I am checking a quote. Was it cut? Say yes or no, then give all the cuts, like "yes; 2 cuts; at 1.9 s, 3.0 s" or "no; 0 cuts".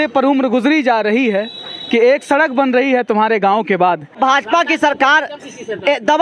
yes; 1 cut; at 4.2 s